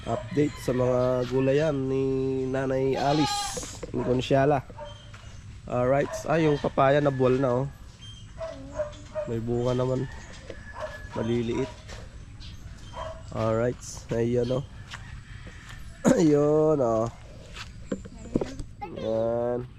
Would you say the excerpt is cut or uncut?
uncut